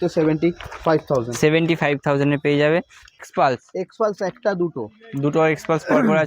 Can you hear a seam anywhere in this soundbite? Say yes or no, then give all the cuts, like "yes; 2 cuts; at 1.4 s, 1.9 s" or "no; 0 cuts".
yes; 1 cut; at 3.2 s